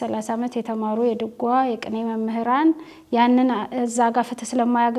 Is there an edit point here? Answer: no; 0 cuts

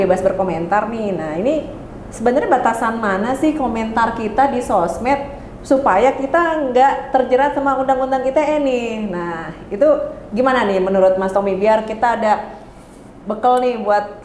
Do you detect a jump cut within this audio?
no; 0 cuts

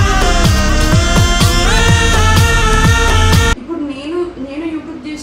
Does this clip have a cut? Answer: yes; 1 cut; at 3.6 s

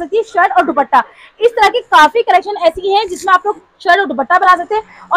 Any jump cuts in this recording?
no; 0 cuts

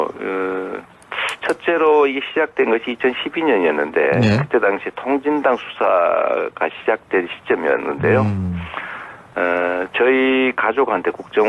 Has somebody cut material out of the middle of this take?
no; 0 cuts

